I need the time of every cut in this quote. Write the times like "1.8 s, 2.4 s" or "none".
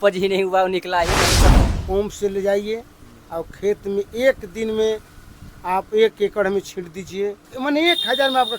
1.6 s, 7.5 s